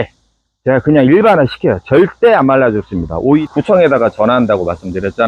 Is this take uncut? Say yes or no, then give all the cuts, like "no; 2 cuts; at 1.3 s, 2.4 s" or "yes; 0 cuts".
no; 1 cut; at 3.4 s